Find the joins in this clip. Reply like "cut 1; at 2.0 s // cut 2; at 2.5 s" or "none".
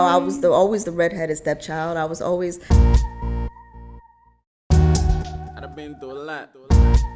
cut 1; at 2.6 s